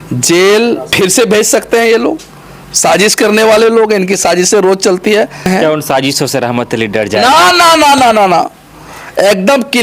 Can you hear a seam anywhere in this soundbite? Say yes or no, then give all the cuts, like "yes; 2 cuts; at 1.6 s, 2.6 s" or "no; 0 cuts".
yes; 2 cuts; at 0.9 s, 5.5 s